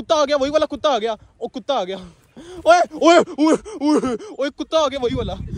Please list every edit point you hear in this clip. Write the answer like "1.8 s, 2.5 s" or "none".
none